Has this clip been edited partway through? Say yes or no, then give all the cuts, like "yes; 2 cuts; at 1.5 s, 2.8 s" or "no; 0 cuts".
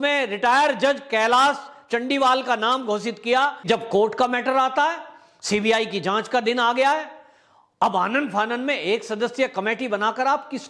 yes; 1 cut; at 3.6 s